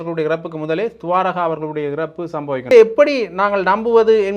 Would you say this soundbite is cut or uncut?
cut